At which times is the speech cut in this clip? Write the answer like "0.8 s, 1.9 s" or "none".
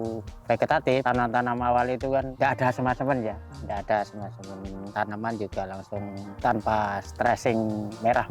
none